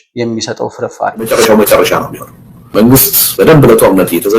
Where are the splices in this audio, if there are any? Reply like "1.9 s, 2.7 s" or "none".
1.3 s